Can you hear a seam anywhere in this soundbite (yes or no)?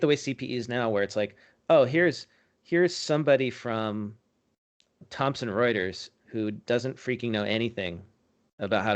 yes